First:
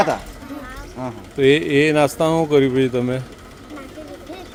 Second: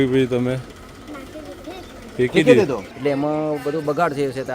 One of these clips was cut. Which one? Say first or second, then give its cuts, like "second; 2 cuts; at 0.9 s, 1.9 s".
second; 1 cut; at 2.9 s